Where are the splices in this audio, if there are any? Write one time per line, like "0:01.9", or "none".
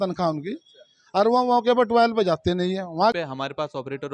0:03.1